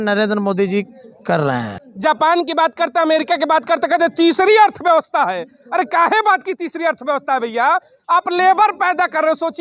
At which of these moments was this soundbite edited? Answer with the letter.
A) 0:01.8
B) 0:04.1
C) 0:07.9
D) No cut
A